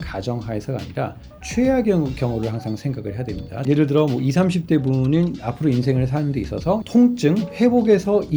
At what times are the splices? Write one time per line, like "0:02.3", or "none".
0:03.5
0:06.8